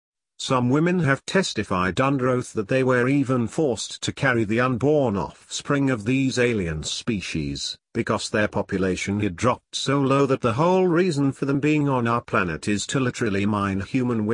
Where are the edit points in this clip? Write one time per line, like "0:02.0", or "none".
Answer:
0:01.6